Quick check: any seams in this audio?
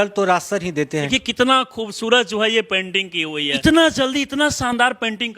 yes; 2 cuts; at 1.1 s, 3.6 s

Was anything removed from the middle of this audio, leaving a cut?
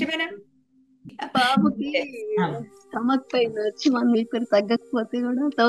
yes; 1 cut; at 1.2 s

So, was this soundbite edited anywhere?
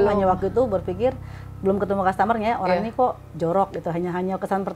no; 0 cuts

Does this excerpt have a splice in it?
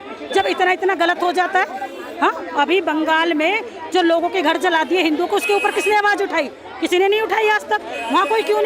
no; 0 cuts

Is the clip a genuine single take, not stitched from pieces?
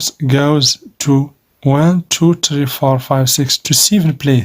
no; 1 cut; at 1.4 s

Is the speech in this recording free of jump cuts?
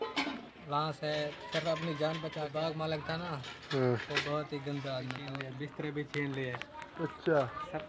no; 2 cuts; at 2.4 s, 5.3 s

